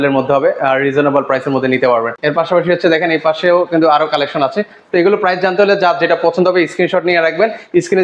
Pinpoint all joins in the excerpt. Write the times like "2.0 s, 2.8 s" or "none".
2.1 s